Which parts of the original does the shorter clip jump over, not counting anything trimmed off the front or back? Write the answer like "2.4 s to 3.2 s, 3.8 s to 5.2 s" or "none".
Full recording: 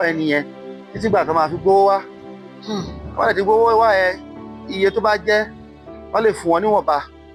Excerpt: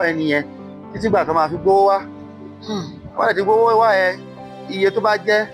none